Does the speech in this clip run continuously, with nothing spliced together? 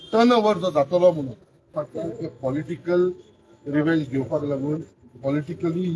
no; 1 cut; at 1.8 s

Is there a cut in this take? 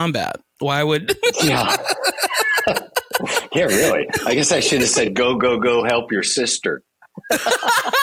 no; 0 cuts

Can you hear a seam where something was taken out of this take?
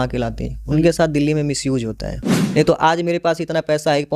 yes; 1 cut; at 2.3 s

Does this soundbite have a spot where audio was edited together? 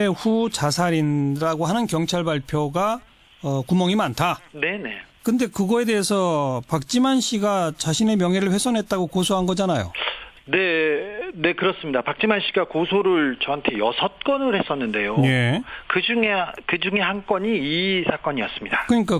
yes; 1 cut; at 3.4 s

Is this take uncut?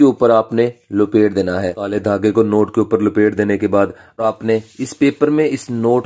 no; 2 cuts; at 1.8 s, 4.2 s

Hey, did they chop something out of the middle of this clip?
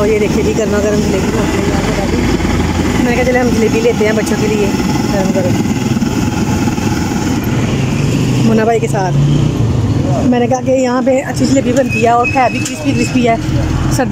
no; 0 cuts

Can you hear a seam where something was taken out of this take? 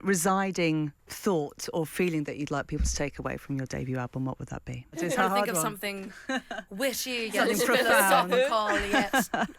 yes; 2 cuts; at 1.0 s, 5.0 s

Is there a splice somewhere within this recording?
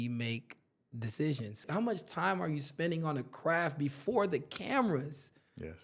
yes; 1 cut; at 1.7 s

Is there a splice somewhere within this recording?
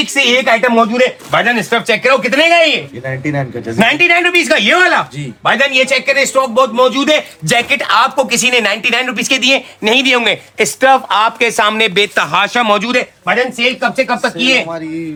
no; 0 cuts

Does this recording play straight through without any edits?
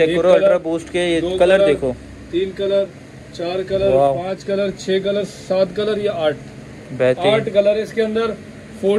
yes; 0 cuts

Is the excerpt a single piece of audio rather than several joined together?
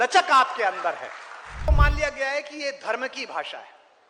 no; 1 cut; at 1.7 s

